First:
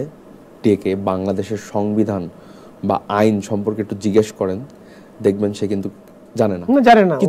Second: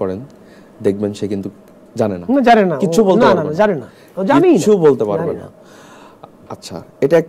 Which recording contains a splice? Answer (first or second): second